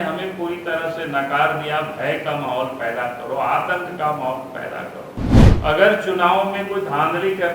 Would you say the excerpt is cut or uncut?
cut